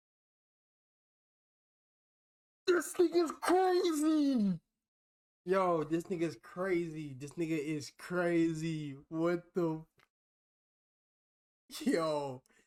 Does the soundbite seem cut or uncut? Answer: uncut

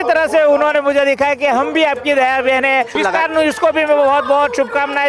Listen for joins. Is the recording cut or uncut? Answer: cut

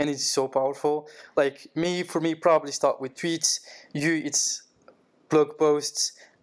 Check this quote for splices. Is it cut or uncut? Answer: uncut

